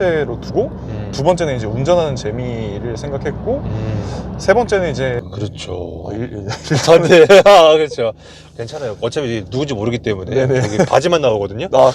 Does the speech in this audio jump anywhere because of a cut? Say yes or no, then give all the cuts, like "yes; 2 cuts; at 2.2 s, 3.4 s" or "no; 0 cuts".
yes; 1 cut; at 5.2 s